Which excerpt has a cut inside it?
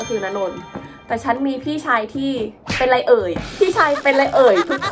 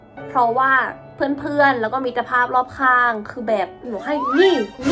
second; 1 cut; at 3.9 s

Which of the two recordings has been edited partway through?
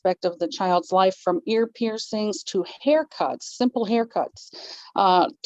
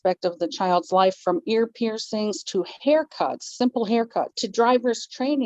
second; 1 cut; at 4.4 s

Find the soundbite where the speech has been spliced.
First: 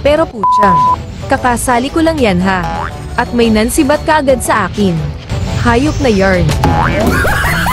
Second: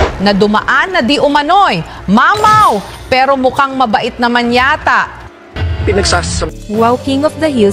second; 1 cut; at 6.4 s

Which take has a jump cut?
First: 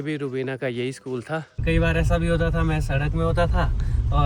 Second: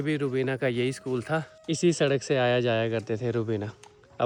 first; 1 cut; at 1.6 s

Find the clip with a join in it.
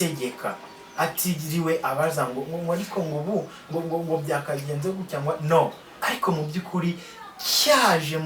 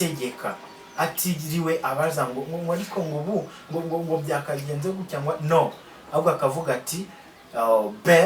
first; 1 cut; at 5.9 s

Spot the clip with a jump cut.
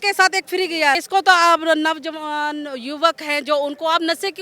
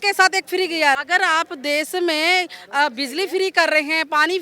second; 1 cut; at 1.0 s

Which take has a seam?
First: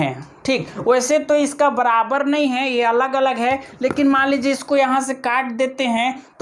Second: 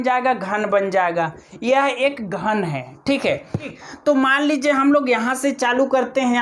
second; 1 cut; at 3.7 s

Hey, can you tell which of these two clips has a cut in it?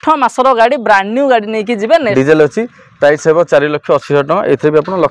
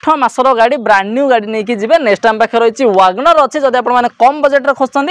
first; 1 cut; at 2.1 s

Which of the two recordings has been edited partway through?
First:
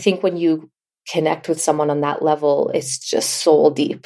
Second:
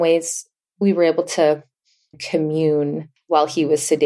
second; 2 cuts; at 2.2 s, 3.1 s

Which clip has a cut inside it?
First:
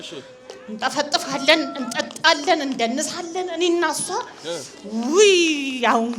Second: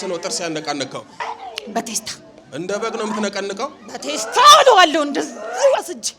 second; 1 cut; at 1.2 s

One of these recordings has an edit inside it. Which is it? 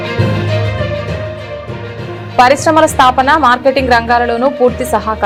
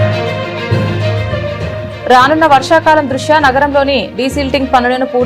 second; 1 cut; at 1.9 s

